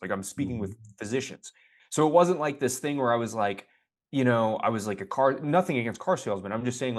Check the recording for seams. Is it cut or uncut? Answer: uncut